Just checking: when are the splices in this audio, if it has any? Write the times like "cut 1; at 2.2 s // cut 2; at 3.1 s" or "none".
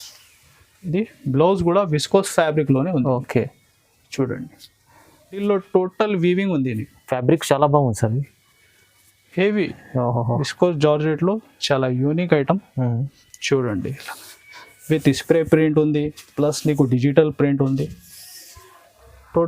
cut 1; at 5.4 s